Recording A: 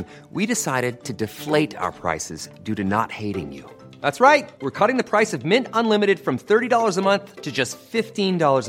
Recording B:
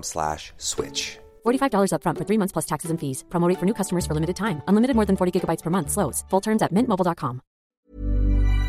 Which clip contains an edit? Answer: B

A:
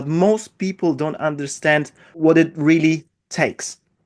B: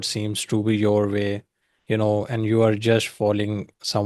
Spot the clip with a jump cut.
A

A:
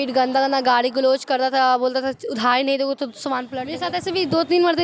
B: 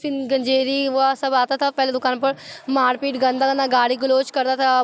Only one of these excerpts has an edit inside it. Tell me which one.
A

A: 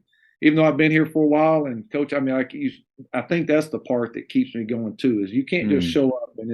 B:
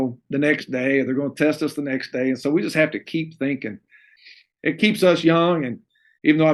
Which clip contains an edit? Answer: B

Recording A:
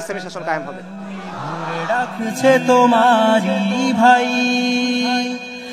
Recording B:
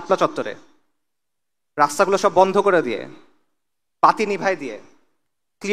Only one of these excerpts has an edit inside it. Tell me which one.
A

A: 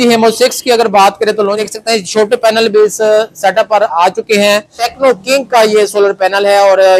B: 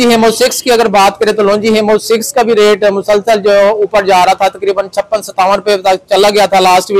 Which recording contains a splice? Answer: A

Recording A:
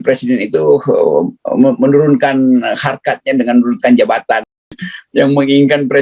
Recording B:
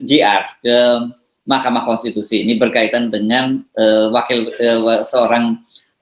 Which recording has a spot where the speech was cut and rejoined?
A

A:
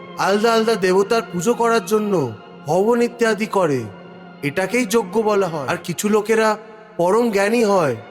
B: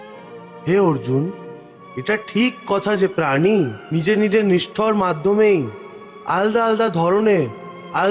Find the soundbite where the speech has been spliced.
A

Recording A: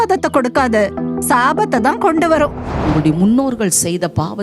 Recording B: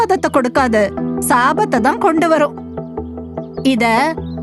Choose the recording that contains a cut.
A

